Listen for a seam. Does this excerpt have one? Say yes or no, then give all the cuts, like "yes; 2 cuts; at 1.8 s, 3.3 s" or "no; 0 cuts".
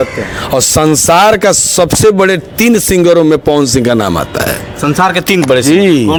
no; 0 cuts